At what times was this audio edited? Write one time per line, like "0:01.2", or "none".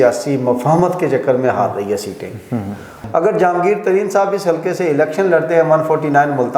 0:03.0